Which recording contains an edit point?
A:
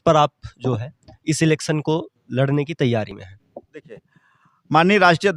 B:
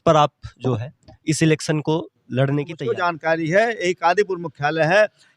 B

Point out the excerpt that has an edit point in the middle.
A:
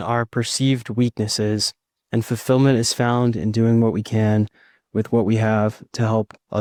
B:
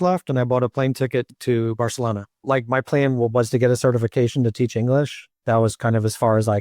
B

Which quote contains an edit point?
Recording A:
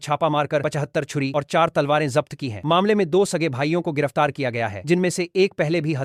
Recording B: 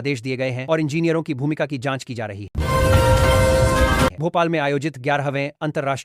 B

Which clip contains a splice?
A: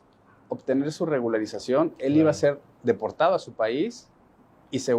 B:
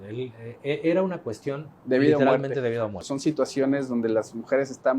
B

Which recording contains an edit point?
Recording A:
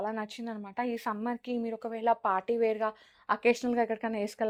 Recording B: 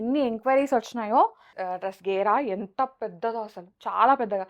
B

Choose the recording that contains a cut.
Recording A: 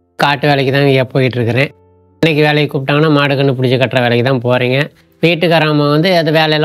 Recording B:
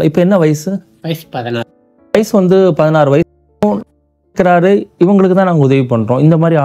B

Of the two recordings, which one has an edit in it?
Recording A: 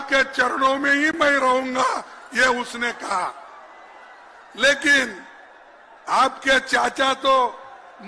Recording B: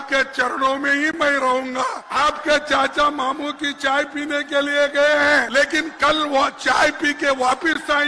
B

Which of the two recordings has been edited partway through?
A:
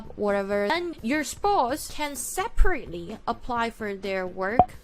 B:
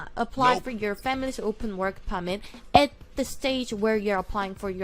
A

